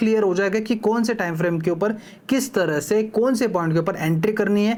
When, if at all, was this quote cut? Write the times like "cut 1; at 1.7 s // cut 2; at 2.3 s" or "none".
none

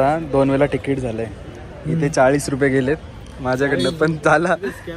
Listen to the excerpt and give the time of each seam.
none

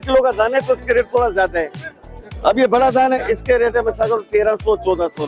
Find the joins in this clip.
none

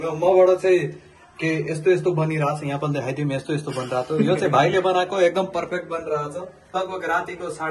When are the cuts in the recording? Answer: cut 1; at 6.7 s

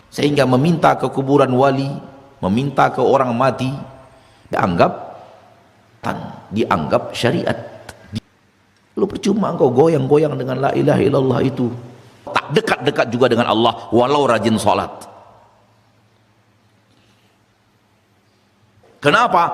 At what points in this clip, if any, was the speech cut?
cut 1; at 4.5 s // cut 2; at 6.0 s // cut 3; at 8.2 s // cut 4; at 12.4 s

